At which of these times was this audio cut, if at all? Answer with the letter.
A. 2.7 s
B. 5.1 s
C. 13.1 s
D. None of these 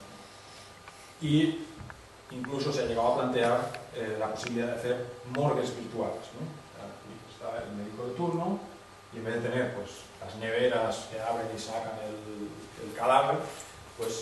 A